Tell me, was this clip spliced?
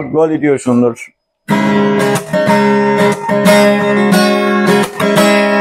no; 0 cuts

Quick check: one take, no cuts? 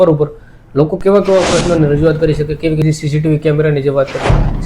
no; 1 cut; at 2.8 s

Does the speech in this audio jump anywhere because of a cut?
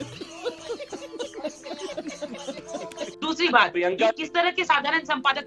yes; 1 cut; at 3.0 s

